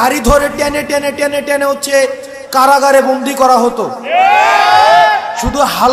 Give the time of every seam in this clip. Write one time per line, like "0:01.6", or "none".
none